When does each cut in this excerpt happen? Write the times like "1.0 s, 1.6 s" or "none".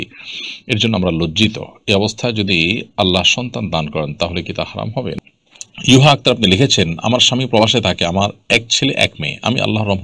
5.1 s